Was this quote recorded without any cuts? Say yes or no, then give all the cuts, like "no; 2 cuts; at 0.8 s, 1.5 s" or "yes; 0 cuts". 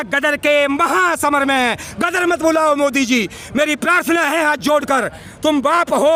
yes; 0 cuts